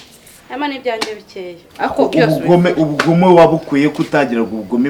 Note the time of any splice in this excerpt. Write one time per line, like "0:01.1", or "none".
0:01.6

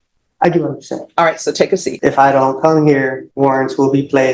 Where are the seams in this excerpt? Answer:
0:01.9
0:03.2

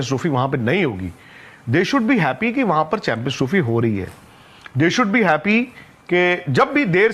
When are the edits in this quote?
none

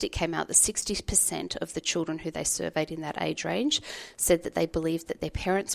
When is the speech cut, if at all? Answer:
none

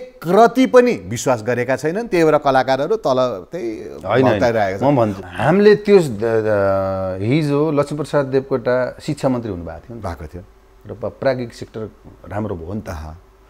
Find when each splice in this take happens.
none

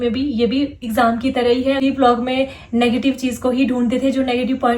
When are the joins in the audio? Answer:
0:01.8

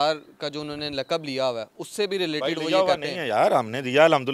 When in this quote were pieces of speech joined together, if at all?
none

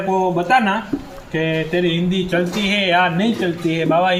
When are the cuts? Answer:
none

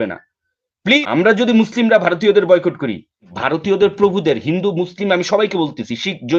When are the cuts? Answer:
0:01.0
0:03.3

